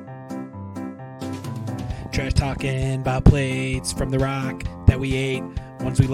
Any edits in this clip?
yes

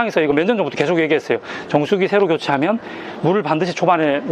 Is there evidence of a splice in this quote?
no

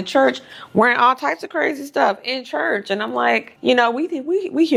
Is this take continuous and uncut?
yes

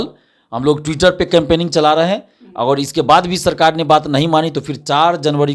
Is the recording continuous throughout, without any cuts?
yes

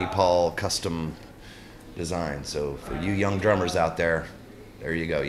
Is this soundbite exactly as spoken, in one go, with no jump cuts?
yes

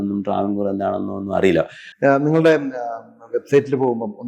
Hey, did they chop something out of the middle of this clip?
yes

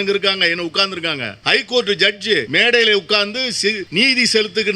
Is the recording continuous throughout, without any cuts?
no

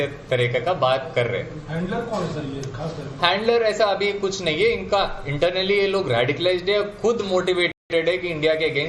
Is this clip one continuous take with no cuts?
yes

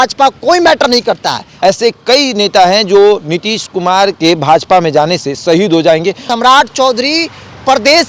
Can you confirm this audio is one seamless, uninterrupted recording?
no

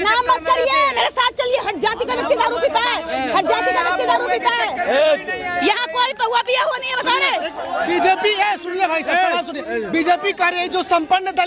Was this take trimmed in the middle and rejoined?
no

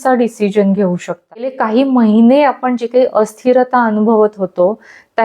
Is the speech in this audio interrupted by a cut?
yes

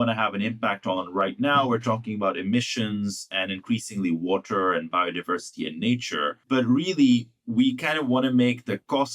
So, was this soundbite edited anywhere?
yes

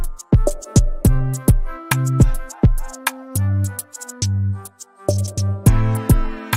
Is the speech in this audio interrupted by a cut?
yes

